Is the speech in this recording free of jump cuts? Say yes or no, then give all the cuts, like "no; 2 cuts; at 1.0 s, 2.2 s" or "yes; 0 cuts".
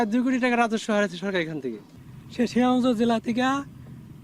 yes; 0 cuts